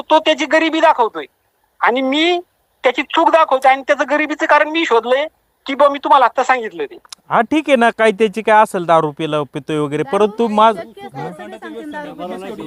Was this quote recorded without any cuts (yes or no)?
yes